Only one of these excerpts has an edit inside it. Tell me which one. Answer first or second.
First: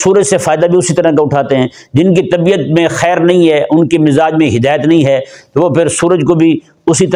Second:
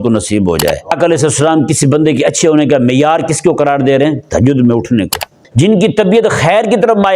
second